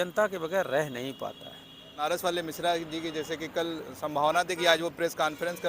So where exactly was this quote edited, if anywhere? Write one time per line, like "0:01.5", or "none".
0:02.0